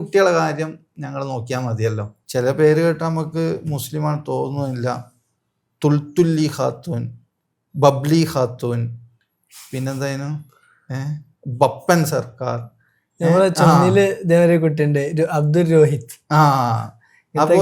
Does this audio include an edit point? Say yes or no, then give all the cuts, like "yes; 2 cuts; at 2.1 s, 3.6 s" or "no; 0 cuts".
yes; 1 cut; at 2.2 s